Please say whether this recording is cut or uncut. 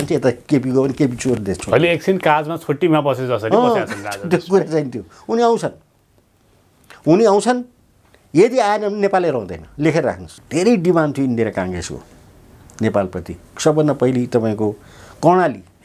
cut